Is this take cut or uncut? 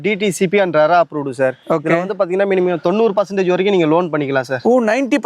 uncut